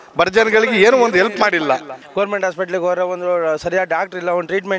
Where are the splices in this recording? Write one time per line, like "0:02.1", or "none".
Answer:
0:02.0

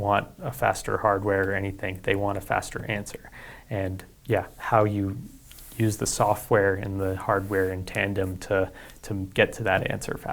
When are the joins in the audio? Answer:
none

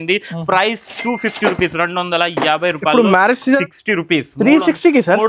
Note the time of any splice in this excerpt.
0:03.6

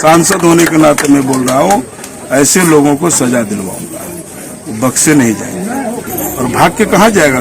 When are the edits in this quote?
0:06.1

